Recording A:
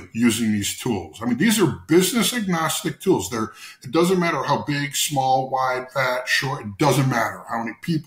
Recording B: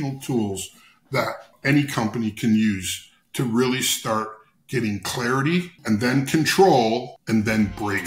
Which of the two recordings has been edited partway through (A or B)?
B